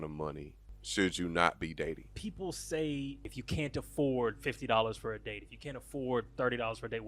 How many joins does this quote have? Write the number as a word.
two